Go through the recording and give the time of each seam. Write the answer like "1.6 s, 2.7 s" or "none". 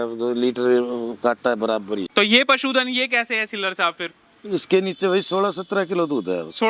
2.1 s